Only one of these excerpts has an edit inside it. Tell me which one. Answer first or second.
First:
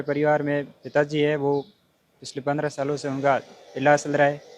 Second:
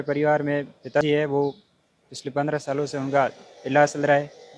second